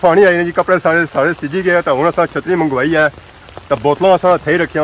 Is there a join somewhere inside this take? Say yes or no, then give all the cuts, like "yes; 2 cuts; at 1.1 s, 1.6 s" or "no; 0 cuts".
no; 0 cuts